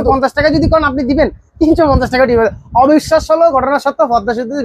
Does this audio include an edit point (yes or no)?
no